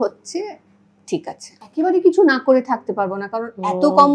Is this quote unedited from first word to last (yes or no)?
no